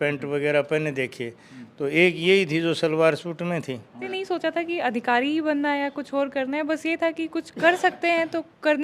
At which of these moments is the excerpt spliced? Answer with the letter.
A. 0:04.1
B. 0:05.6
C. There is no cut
A